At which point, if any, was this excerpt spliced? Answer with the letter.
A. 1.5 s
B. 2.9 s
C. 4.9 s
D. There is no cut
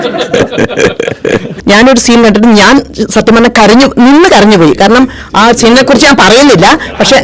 A